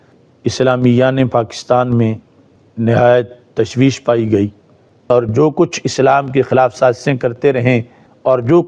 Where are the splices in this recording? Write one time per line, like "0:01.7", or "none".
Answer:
0:05.1